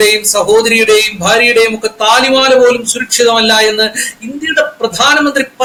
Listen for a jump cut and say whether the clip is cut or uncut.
uncut